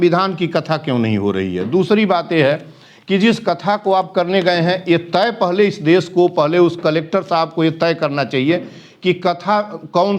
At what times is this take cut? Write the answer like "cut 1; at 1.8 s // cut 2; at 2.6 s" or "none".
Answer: none